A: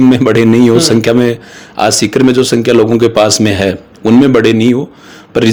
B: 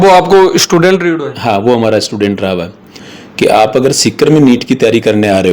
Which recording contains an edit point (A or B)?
B